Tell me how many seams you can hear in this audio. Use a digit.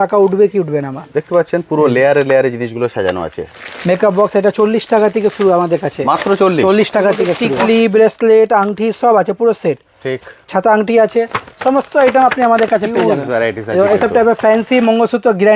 1